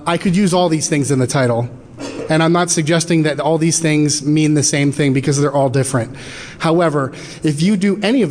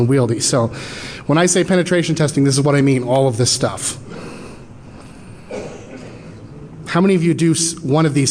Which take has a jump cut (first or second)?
first